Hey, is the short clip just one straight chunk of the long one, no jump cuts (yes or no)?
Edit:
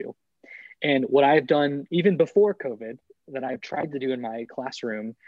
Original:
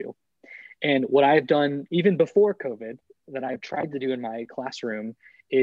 yes